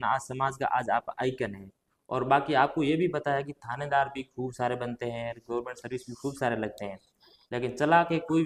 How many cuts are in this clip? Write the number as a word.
zero